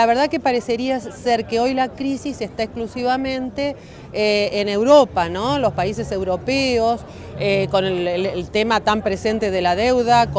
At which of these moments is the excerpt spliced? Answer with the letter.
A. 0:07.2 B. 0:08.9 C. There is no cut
B